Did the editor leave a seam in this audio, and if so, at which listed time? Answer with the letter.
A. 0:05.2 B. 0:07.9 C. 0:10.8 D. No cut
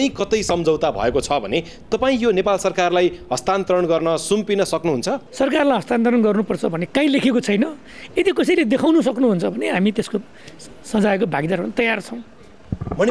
A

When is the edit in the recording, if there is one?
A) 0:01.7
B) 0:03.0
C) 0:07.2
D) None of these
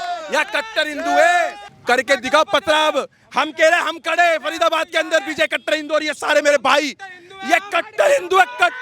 A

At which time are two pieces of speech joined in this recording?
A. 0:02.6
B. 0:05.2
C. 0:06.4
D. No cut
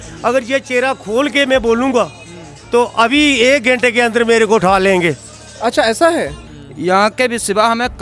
C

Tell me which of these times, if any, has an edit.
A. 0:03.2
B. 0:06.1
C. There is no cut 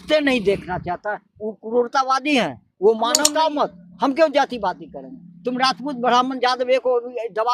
A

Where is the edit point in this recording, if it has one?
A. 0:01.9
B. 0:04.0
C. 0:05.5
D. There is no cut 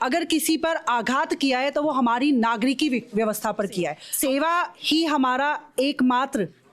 B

